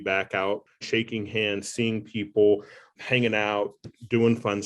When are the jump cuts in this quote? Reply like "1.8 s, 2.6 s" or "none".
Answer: 0.8 s, 2.9 s